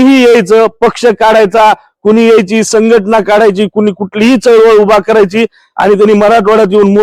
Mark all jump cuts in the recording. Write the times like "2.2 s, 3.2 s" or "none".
none